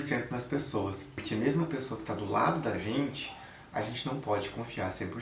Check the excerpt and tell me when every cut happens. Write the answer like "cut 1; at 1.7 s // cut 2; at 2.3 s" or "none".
cut 1; at 1.1 s